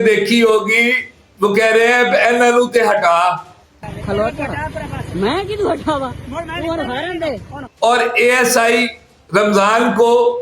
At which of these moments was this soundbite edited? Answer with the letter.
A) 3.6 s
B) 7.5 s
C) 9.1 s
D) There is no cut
B